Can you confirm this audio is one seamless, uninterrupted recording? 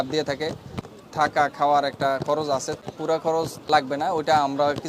no; 3 cuts; at 0.8 s, 2.7 s, 3.6 s

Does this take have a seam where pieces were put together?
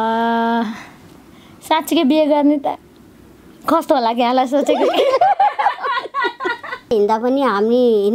yes; 1 cut; at 6.9 s

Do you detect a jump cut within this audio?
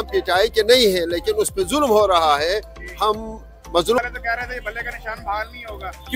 yes; 1 cut; at 4.0 s

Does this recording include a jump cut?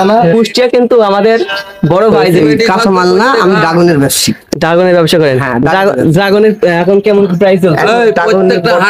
yes; 1 cut; at 2.4 s

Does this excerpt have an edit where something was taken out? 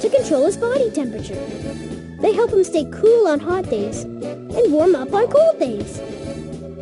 yes; 1 cut; at 5.8 s

